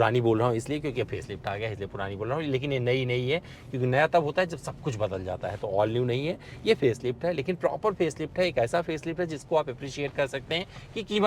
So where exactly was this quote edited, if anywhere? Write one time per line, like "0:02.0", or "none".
none